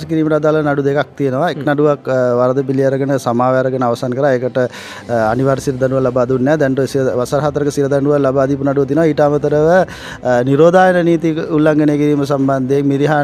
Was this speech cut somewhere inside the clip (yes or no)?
no